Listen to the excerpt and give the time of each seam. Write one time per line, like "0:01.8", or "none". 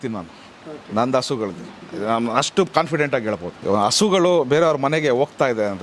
0:03.5